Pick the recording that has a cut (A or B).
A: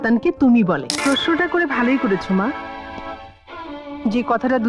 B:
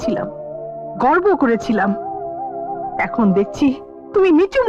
A